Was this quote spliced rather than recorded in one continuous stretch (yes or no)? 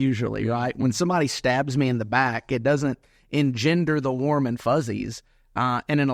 no